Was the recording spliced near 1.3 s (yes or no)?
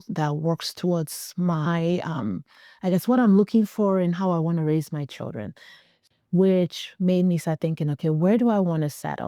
no